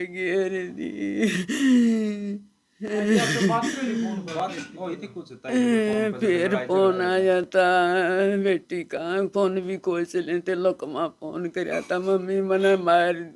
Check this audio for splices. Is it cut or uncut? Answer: uncut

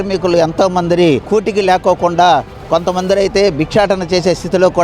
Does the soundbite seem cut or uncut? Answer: cut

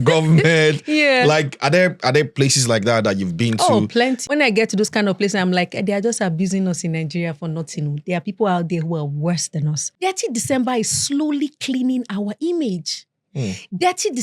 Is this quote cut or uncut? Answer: cut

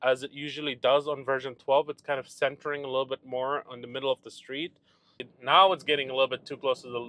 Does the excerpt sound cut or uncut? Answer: cut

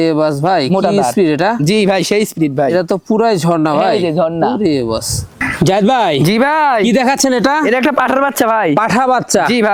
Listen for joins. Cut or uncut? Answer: uncut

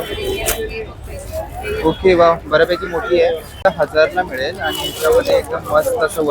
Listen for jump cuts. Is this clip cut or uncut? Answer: cut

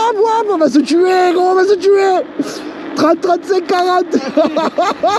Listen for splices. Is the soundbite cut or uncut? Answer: uncut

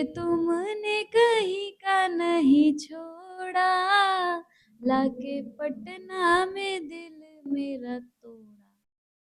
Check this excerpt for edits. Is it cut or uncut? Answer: uncut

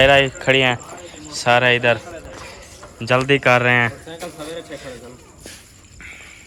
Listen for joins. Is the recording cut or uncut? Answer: uncut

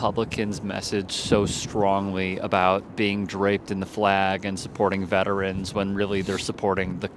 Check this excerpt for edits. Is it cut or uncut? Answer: uncut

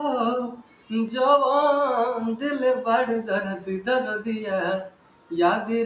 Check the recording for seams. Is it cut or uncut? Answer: uncut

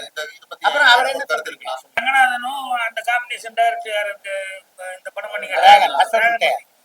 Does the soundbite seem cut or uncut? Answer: cut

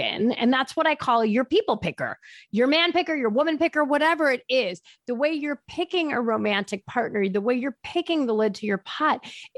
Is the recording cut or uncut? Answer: uncut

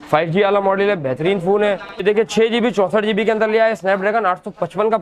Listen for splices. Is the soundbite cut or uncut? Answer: cut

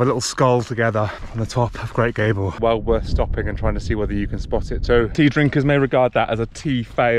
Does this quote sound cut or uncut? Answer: cut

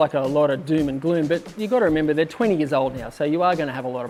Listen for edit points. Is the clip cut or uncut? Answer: uncut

